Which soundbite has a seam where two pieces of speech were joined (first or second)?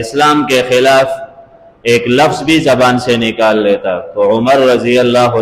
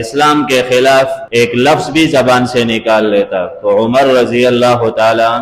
second